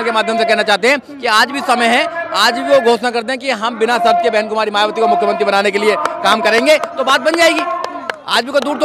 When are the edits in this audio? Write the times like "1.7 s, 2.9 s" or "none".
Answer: none